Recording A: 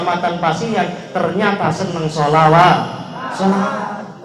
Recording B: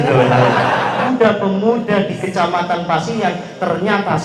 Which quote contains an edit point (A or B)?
B